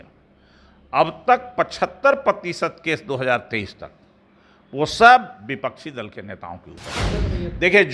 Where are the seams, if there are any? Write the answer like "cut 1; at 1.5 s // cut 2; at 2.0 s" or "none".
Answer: cut 1; at 6.9 s